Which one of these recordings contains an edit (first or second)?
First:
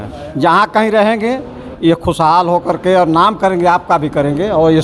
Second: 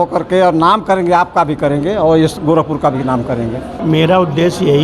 second